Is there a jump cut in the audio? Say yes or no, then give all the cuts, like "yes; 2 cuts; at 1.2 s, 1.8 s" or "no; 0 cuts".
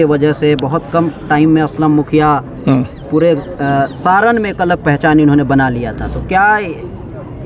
no; 0 cuts